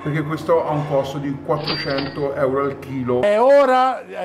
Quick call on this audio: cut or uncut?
cut